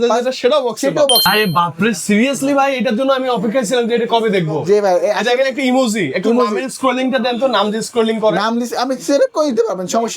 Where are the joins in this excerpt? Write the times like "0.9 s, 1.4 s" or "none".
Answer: 1.2 s

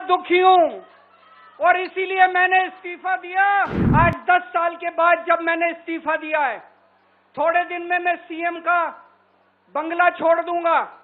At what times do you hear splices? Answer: 3.8 s

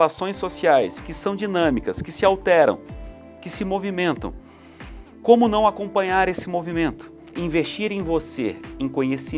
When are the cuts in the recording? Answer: 7.3 s

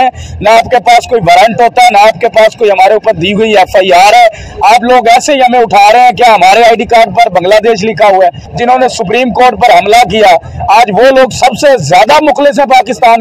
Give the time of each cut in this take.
8.4 s

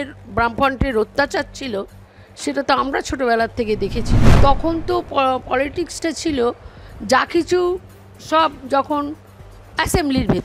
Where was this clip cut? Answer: 4.2 s

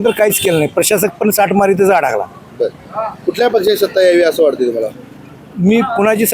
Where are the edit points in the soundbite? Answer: none

